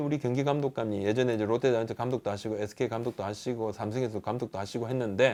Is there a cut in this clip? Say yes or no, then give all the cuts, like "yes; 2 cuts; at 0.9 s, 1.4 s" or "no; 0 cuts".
no; 0 cuts